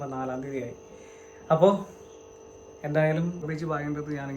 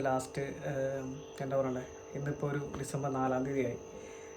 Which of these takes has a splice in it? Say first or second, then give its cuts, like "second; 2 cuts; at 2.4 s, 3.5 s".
first; 1 cut; at 3.4 s